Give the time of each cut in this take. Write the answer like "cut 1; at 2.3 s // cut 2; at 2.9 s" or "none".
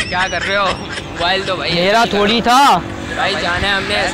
cut 1; at 2.0 s